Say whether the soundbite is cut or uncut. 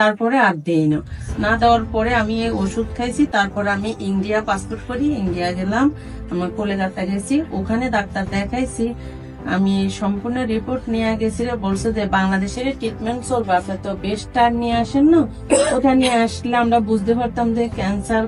uncut